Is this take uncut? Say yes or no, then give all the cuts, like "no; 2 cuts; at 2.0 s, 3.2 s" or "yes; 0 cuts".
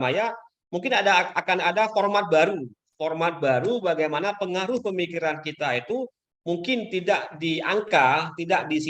yes; 0 cuts